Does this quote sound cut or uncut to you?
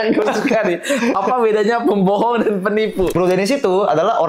cut